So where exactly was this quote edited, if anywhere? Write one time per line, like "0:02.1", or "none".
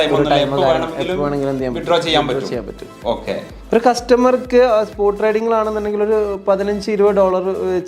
0:03.5